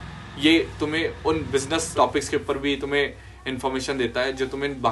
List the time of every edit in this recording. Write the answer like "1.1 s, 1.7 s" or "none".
1.9 s